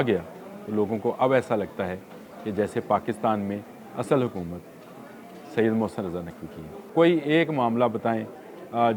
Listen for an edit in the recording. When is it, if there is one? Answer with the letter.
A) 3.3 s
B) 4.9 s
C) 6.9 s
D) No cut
C